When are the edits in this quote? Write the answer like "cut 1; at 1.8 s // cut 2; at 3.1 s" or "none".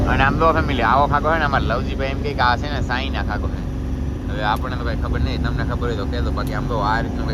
none

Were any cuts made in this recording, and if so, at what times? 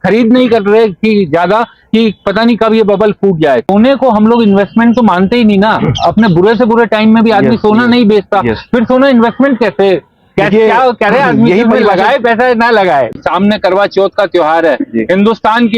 cut 1; at 3.7 s // cut 2; at 13.2 s

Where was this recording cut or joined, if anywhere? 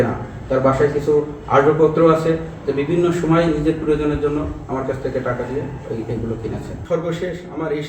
cut 1; at 6.8 s

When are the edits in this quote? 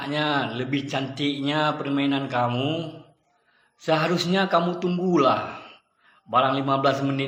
none

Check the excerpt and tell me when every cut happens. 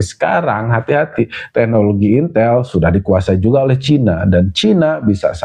none

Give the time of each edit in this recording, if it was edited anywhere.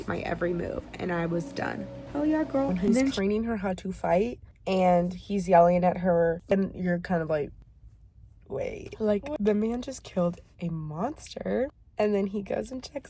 cut 1; at 3.2 s // cut 2; at 6.5 s // cut 3; at 8.9 s

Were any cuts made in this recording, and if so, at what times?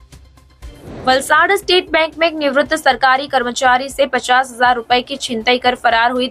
none

